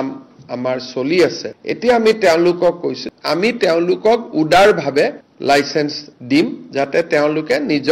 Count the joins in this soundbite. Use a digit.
2